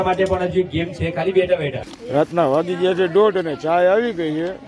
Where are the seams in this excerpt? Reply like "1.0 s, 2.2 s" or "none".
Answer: 1.9 s